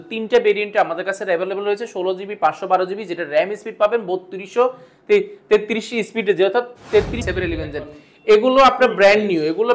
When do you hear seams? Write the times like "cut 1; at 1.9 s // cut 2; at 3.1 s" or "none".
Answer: cut 1; at 7.3 s